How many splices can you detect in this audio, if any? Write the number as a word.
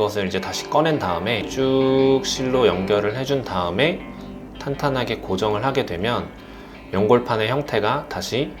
one